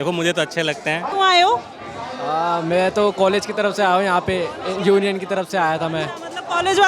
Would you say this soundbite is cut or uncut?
cut